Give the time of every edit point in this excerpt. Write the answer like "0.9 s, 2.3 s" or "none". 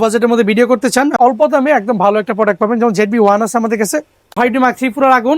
1.1 s, 4.3 s